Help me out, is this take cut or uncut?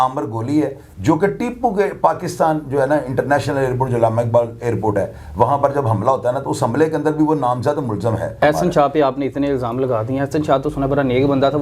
cut